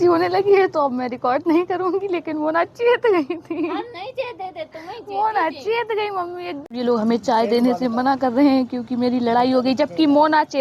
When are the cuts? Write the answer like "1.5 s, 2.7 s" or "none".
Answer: 6.6 s